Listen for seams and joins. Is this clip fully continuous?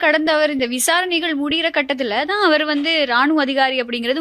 yes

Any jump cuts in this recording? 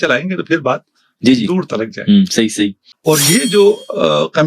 yes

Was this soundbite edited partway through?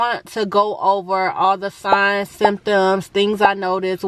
no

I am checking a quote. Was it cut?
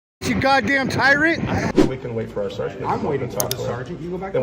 yes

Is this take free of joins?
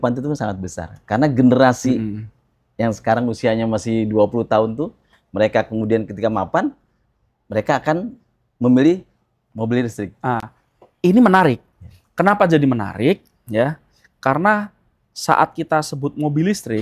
yes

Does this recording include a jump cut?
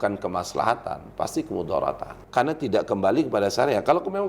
yes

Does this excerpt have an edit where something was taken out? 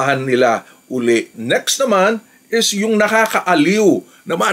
yes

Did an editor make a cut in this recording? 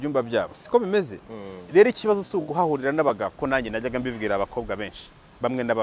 yes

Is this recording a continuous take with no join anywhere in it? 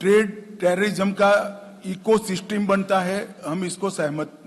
yes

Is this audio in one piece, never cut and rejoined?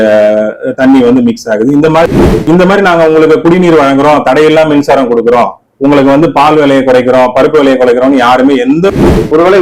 no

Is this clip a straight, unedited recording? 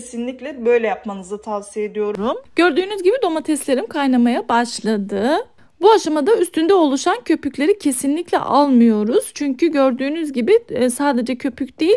no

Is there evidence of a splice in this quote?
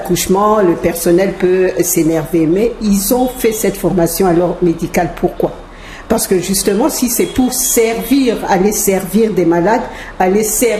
no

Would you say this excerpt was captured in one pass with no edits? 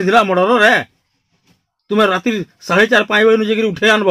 yes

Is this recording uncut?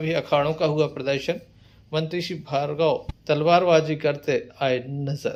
yes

